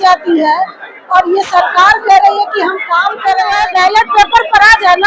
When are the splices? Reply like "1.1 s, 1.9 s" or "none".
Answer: 3.6 s